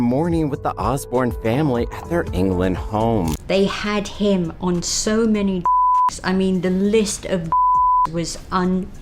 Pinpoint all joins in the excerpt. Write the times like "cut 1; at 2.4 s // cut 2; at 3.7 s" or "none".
cut 1; at 3.4 s

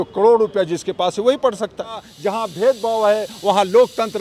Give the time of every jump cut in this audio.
cut 1; at 2.1 s

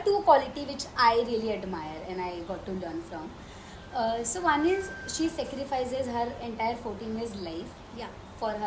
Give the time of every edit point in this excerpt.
none

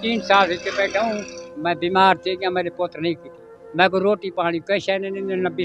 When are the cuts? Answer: cut 1; at 1.3 s

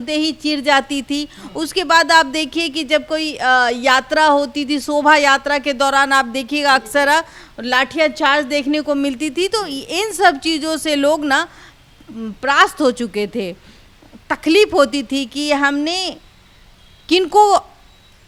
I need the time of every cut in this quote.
none

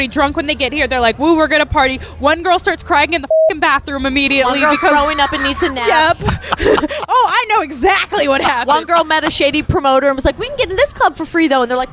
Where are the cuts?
cut 1; at 9.7 s

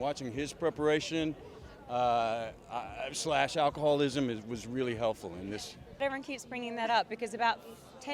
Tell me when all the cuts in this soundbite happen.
cut 1; at 6.0 s

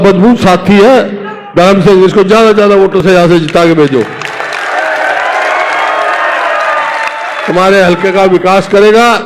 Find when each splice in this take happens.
none

